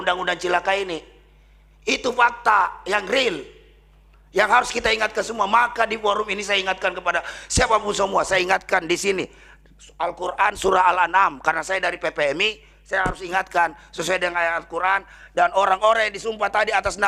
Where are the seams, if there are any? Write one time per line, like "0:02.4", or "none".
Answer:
none